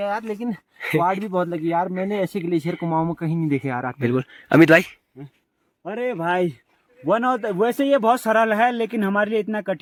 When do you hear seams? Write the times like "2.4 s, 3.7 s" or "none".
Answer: none